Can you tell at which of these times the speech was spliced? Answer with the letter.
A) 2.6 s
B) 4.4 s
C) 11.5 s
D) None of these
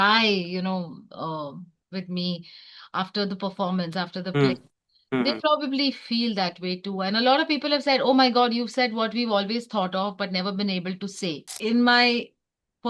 C